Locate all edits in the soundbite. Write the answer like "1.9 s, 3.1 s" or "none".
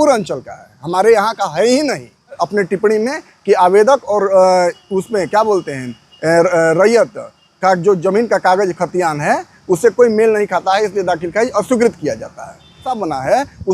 2.4 s, 13.0 s